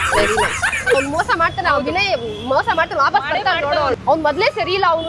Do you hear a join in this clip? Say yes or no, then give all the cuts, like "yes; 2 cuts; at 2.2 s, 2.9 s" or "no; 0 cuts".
yes; 2 cuts; at 1.0 s, 4.0 s